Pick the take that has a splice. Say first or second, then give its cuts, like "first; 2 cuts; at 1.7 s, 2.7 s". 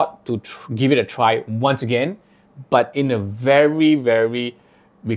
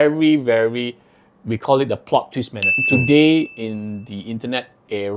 second; 1 cut; at 2.8 s